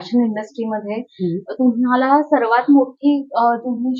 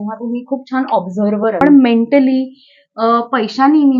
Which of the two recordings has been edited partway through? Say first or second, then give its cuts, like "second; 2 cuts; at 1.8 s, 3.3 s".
second; 1 cut; at 1.6 s